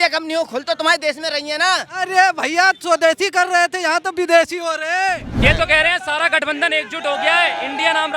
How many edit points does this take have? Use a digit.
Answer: 1